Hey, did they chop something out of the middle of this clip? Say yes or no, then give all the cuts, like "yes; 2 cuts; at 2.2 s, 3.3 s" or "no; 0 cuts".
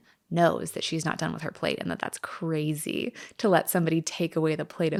no; 0 cuts